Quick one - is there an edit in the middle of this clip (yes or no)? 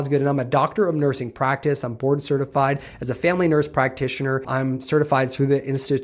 yes